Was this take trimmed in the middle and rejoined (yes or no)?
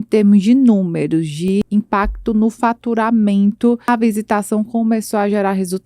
yes